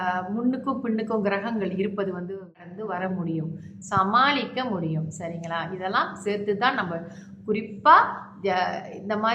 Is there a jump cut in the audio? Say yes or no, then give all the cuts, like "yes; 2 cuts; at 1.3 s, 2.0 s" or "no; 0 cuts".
yes; 1 cut; at 2.6 s